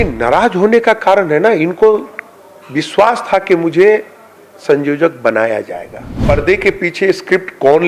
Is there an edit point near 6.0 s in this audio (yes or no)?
yes